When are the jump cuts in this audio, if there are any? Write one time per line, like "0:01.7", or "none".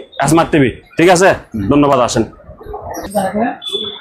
none

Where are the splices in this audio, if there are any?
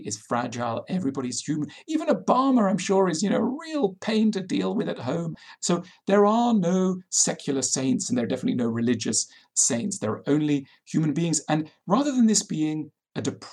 0:05.4

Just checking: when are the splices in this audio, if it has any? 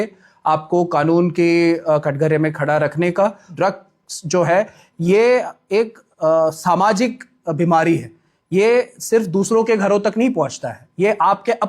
0:03.5

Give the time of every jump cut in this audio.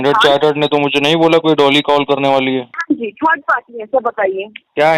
0:02.7

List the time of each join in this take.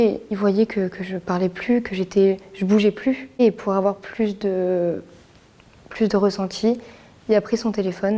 0:03.4

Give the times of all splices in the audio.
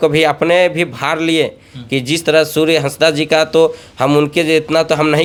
none

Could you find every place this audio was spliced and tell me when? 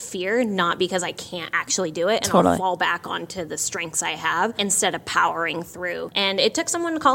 0:04.6
0:06.0

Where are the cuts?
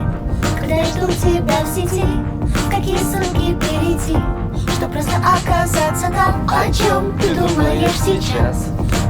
none

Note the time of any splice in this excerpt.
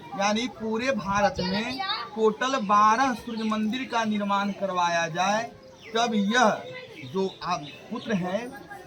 none

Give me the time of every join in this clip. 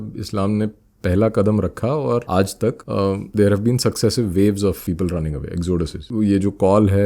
0:02.8
0:04.8
0:06.0

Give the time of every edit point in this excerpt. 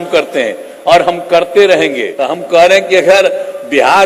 0:02.1

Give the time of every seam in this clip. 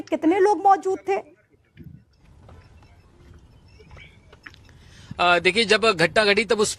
none

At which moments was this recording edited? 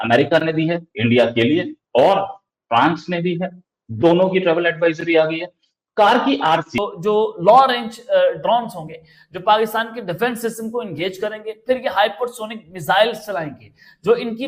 0:06.7

